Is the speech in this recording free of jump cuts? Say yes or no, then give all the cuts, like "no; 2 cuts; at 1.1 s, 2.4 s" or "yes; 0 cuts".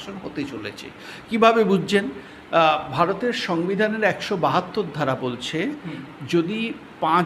yes; 0 cuts